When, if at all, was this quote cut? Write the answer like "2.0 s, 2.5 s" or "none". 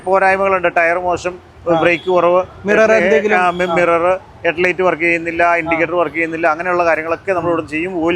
none